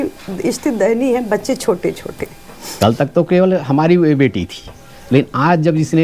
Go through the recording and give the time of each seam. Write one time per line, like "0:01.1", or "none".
0:02.7